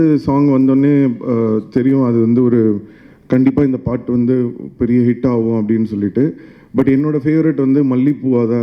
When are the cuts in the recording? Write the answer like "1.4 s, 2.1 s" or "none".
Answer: none

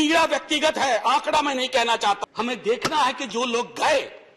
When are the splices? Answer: 2.2 s

